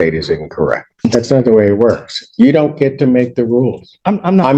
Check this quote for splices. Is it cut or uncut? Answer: cut